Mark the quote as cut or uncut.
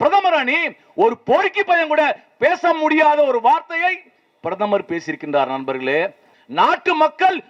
cut